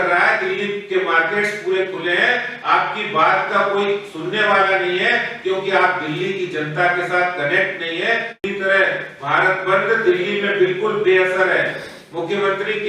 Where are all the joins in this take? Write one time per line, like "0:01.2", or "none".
0:08.4